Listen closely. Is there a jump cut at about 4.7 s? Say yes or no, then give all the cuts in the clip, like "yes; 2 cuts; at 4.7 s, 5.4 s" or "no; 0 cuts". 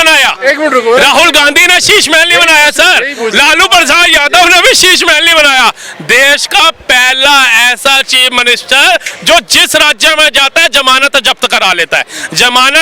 no; 0 cuts